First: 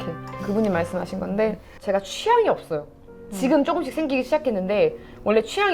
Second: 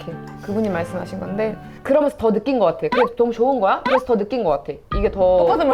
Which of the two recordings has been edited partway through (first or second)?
second